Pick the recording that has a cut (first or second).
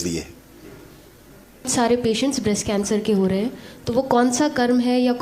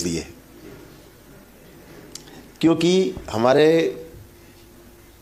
first